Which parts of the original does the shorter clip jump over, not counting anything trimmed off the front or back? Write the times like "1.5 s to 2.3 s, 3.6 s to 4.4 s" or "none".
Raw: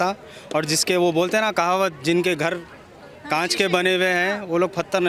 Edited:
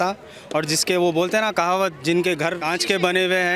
2.6 s to 3.3 s

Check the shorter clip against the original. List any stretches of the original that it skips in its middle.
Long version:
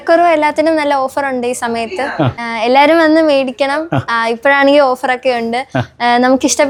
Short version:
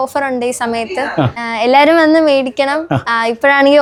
none

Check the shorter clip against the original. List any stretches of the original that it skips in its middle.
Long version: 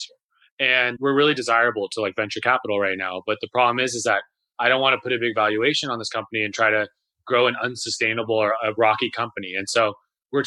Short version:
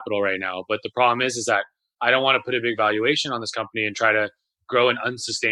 none

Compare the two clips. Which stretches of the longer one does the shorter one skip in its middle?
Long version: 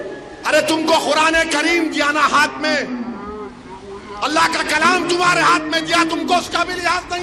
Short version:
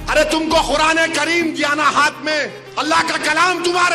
2.9 s to 4.0 s

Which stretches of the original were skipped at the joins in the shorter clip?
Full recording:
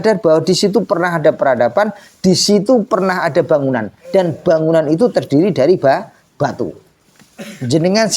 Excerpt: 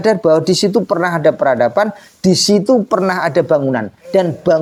none

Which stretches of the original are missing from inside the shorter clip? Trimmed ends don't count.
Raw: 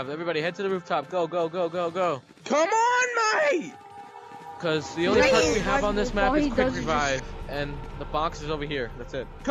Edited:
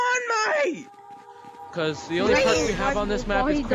none

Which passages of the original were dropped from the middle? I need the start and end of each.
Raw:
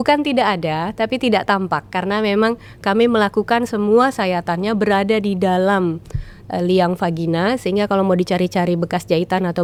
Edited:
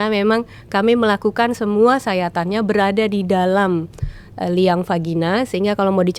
none

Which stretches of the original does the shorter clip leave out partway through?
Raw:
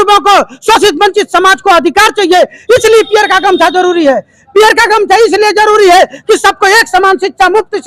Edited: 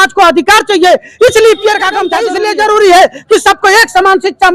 3.7 s to 5.2 s

